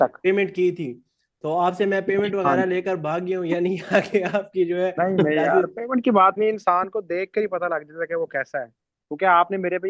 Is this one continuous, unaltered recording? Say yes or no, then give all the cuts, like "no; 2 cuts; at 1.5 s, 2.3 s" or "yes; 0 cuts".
yes; 0 cuts